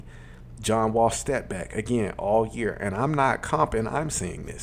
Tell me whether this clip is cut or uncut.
uncut